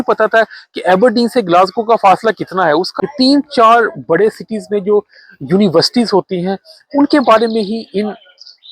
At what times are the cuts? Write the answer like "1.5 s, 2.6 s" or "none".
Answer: 2.9 s